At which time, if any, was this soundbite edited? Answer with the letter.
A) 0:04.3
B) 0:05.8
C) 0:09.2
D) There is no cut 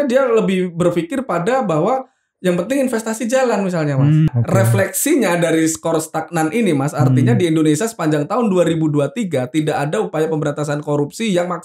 A